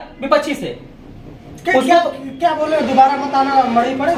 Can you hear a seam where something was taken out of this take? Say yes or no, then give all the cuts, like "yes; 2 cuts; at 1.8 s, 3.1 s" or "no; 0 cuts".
no; 0 cuts